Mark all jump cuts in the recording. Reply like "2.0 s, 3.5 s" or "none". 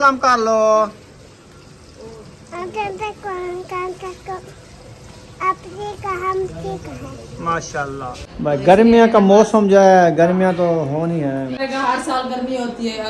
8.2 s, 11.6 s